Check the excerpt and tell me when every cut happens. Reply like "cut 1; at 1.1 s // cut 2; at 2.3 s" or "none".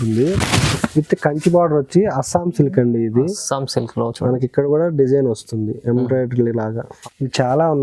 cut 1; at 6.9 s